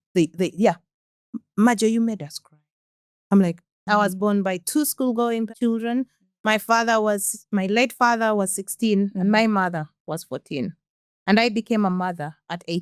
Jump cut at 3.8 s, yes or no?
yes